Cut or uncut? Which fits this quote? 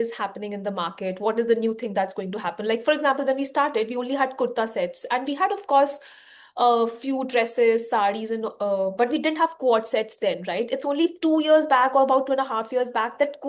uncut